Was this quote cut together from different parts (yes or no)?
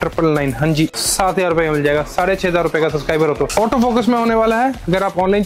yes